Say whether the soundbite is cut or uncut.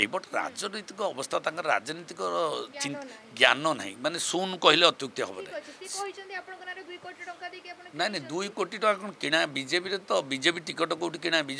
uncut